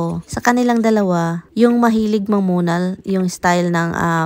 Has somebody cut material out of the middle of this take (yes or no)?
no